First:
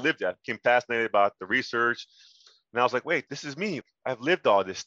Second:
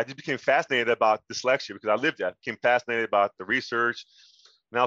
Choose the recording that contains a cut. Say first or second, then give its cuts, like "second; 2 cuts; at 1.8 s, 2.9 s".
first; 1 cut; at 3.8 s